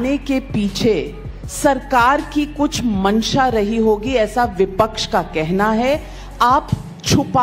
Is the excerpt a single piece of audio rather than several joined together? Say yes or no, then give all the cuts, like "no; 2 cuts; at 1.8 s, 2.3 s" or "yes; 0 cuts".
yes; 0 cuts